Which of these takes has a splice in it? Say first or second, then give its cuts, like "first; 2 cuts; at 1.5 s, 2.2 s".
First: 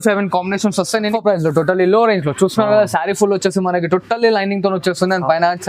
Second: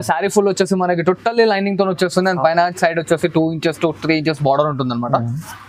first; 1 cut; at 1.1 s